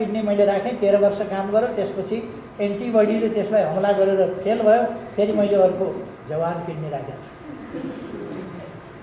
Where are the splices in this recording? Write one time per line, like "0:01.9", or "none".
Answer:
none